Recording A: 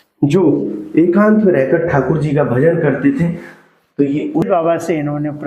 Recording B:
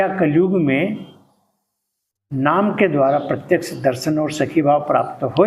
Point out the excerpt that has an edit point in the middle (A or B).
A